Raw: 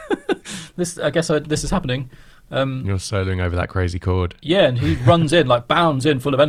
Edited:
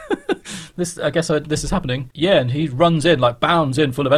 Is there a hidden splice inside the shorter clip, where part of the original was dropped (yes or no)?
yes